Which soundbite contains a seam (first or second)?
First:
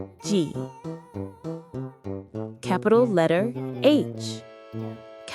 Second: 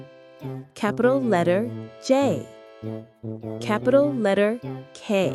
first